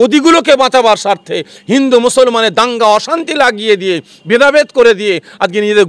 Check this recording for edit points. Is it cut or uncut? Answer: uncut